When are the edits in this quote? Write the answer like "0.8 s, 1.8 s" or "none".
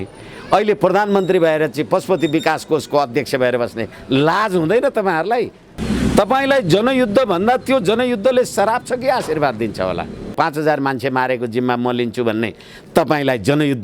5.7 s, 10.3 s